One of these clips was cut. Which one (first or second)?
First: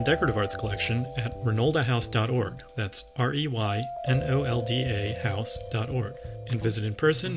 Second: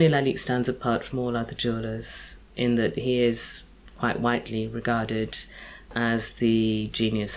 second